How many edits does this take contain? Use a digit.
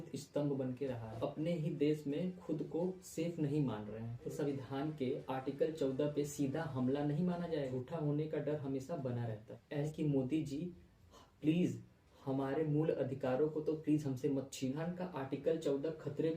5